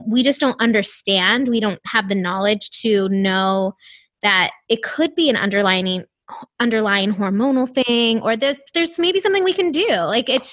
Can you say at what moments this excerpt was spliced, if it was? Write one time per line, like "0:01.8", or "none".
none